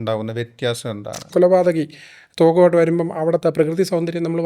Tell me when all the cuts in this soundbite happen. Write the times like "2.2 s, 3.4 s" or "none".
1.3 s